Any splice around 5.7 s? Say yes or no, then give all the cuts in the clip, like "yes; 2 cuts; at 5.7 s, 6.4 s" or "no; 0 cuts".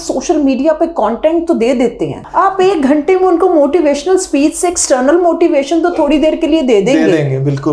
no; 1 cut; at 2.2 s